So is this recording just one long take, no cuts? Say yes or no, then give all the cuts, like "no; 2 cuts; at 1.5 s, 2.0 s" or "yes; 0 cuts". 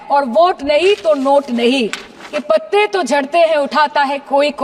no; 1 cut; at 2.5 s